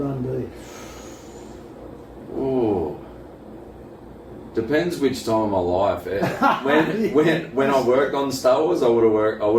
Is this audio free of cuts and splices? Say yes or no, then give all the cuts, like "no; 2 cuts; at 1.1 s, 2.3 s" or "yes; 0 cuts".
yes; 0 cuts